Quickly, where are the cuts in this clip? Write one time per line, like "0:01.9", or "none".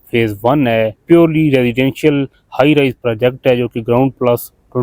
0:01.0